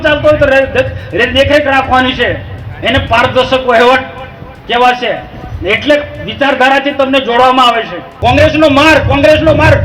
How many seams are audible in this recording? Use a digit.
1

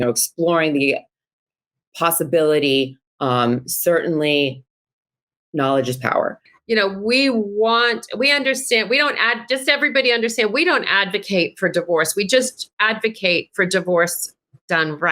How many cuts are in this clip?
1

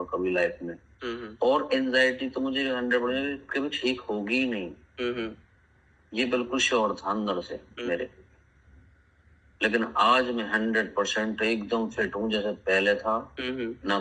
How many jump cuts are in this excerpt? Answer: 0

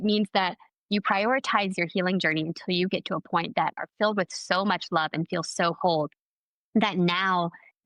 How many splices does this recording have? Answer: 0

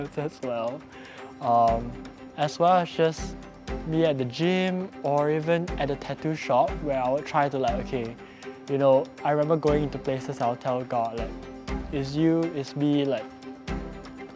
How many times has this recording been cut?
0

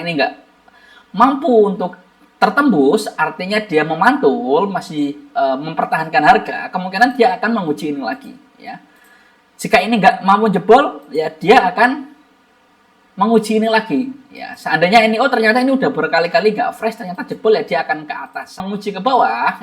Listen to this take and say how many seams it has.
1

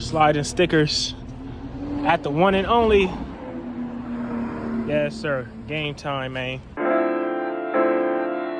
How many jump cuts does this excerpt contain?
0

